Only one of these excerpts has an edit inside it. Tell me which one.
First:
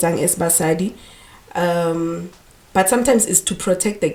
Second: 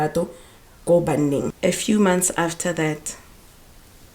second; 1 cut; at 1.5 s

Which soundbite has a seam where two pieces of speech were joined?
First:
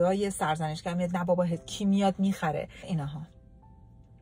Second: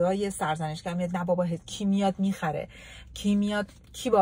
first; 1 cut; at 2.9 s

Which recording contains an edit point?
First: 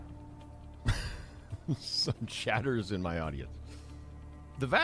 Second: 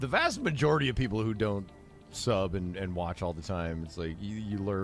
first; 2 cuts; at 1.7 s, 3.5 s

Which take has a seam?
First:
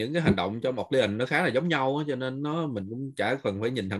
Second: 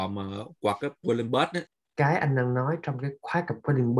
second; 1 cut; at 1.8 s

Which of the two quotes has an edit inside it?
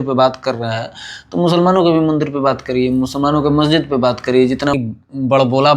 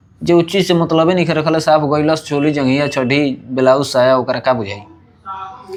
first; 1 cut; at 4.7 s

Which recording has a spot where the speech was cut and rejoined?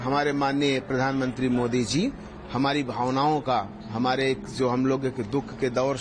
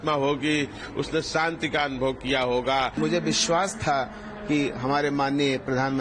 second; 1 cut; at 3.0 s

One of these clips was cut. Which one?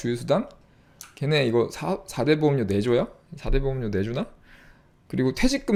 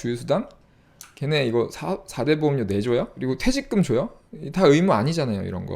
second; 1 cut; at 3.1 s

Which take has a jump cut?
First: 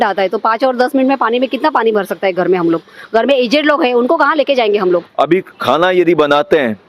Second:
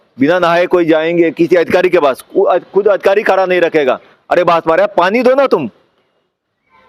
first; 1 cut; at 5.1 s

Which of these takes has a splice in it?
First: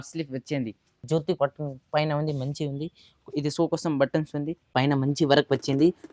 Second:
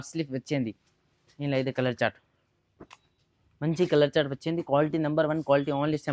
first; 2 cuts; at 1.0 s, 4.7 s

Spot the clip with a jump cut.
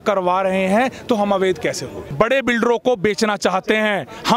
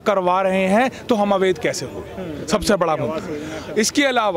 first; 1 cut; at 2.0 s

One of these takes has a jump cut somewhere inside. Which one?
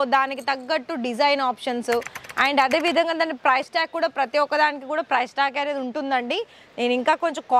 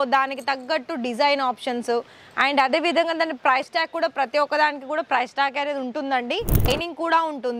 second; 1 cut; at 6.7 s

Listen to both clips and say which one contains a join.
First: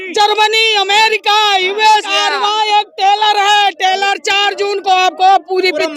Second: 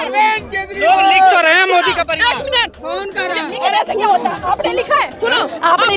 first; 1 cut; at 2.1 s

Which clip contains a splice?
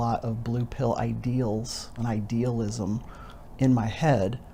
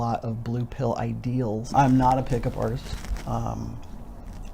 second; 1 cut; at 1.7 s

